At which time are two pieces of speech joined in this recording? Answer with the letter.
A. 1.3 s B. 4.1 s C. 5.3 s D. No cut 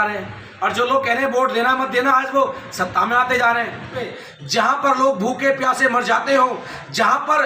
B